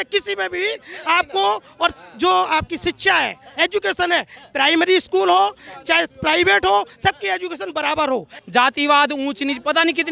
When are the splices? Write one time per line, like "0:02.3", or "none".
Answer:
0:08.4